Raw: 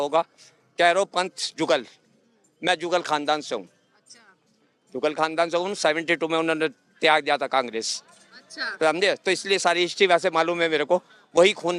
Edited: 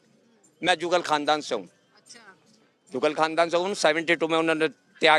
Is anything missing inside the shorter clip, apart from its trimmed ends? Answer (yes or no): no